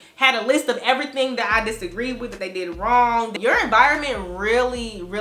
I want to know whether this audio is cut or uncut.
cut